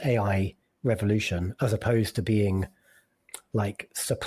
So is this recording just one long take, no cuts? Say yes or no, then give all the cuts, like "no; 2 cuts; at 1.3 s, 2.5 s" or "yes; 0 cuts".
no; 1 cut; at 3.2 s